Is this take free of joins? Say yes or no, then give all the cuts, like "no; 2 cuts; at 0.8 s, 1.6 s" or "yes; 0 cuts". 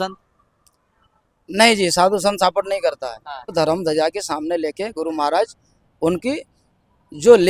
no; 1 cut; at 3.5 s